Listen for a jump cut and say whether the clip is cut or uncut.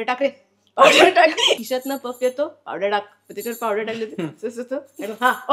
cut